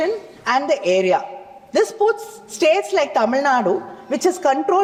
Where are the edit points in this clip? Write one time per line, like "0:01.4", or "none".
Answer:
none